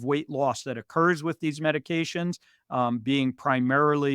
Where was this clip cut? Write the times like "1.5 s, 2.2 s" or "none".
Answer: none